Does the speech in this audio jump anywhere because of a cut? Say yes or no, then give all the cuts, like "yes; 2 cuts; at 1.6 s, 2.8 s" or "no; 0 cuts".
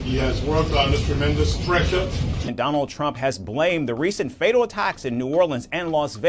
yes; 1 cut; at 2.5 s